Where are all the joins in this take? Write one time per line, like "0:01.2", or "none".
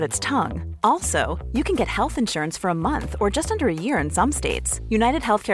none